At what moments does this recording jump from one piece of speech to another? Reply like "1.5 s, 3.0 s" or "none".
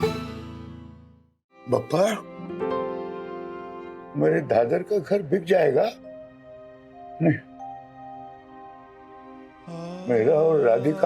1.6 s